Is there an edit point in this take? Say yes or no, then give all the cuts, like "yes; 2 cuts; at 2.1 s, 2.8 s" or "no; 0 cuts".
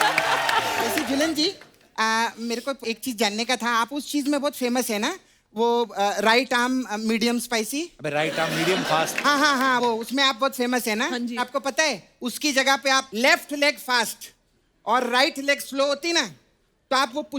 yes; 1 cut; at 1.0 s